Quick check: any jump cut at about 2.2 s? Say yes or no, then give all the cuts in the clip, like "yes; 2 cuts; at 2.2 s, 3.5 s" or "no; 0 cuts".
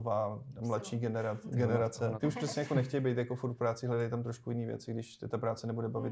yes; 1 cut; at 2.2 s